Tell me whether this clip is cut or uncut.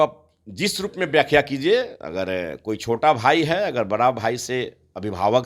uncut